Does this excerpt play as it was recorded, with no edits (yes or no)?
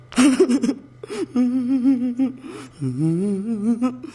yes